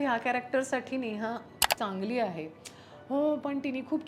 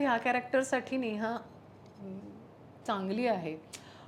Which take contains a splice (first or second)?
first